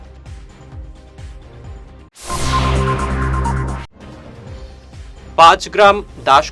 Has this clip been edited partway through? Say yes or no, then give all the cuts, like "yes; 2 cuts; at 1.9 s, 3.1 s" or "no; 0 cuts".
yes; 1 cut; at 3.8 s